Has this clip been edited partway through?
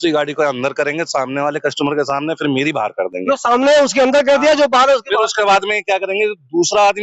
no; 0 cuts

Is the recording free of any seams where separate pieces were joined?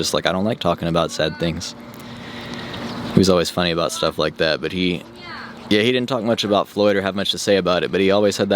no; 1 cut; at 2.3 s

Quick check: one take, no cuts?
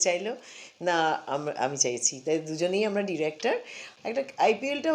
no; 1 cut; at 3.8 s

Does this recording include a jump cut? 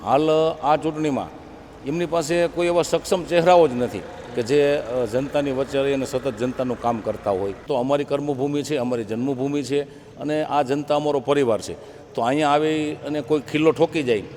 yes; 1 cut; at 7.7 s

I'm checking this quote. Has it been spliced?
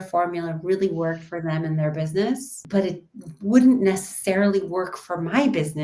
yes; 1 cut; at 2.5 s

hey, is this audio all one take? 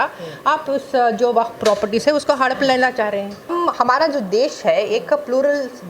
no; 1 cut; at 3.5 s

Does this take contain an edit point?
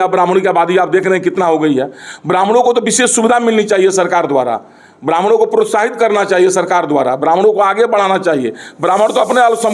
no; 0 cuts

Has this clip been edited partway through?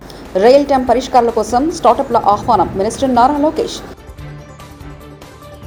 no; 0 cuts

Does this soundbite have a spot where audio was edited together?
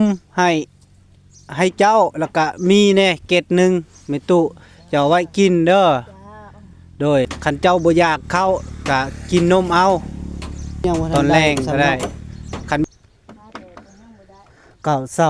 yes; 2 cuts; at 7.3 s, 12.8 s

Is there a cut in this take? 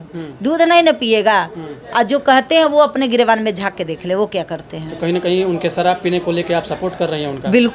no; 0 cuts

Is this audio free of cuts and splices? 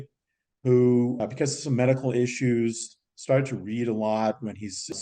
yes; 0 cuts

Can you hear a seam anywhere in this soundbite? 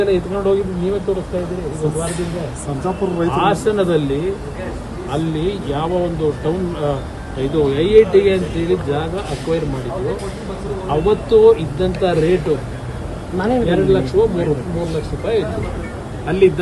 no; 0 cuts

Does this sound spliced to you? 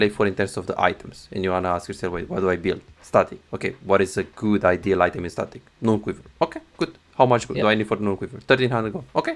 no; 0 cuts

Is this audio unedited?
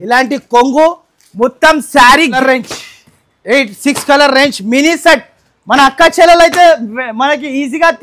no; 1 cut; at 2.4 s

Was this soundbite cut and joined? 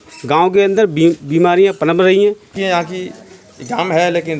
yes; 1 cut; at 2.5 s

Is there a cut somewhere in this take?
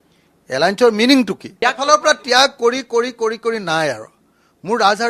yes; 1 cut; at 1.4 s

